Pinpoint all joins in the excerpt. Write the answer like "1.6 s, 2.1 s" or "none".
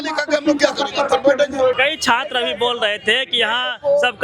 1.8 s